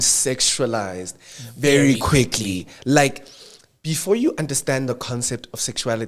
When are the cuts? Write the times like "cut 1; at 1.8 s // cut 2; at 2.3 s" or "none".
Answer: none